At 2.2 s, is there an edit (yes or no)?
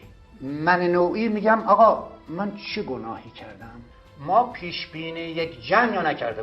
no